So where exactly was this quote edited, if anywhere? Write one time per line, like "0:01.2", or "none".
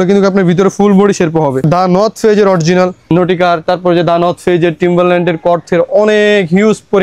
0:01.7
0:03.1